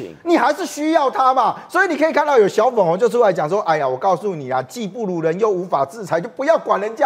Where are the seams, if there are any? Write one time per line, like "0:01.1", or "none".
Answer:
none